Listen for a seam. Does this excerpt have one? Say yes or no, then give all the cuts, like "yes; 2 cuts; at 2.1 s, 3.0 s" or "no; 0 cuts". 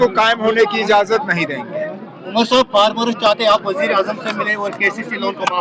no; 0 cuts